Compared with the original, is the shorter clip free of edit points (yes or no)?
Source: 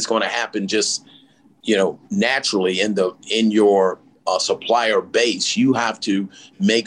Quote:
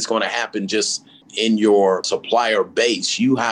no